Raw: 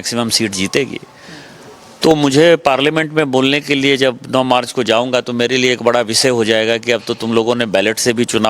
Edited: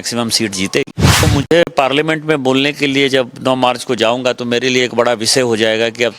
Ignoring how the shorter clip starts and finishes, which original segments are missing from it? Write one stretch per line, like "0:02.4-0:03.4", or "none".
0:01.2-0:02.1